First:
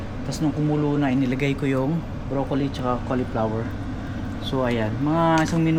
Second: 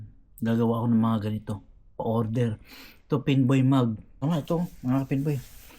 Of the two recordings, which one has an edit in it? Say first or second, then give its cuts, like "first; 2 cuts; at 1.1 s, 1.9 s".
second; 1 cut; at 4.1 s